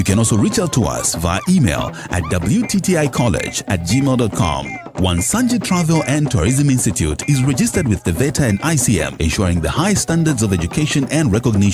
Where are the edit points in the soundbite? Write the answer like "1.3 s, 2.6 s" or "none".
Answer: none